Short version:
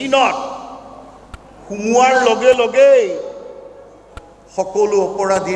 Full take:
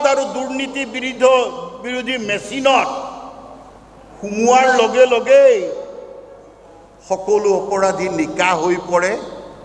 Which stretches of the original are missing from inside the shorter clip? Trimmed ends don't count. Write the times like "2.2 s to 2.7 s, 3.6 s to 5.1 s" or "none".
none